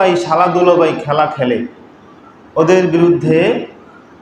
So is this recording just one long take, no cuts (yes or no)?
yes